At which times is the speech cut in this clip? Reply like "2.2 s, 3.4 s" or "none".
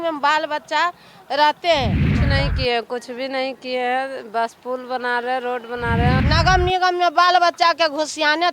2.2 s, 6.2 s